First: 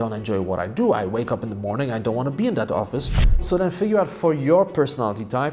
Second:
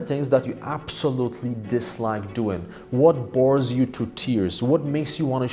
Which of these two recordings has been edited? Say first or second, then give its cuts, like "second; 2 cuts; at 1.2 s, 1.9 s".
first; 1 cut; at 3.4 s